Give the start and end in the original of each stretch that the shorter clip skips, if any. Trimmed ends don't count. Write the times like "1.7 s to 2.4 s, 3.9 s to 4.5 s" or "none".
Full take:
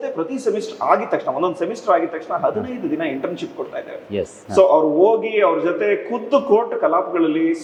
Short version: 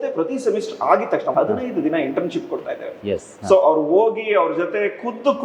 1.3 s to 2.4 s